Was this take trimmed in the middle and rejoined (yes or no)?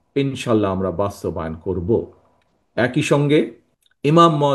no